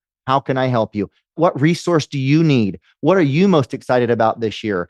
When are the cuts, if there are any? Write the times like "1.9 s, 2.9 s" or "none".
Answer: 1.4 s